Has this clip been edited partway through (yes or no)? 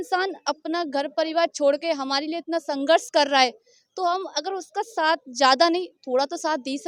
no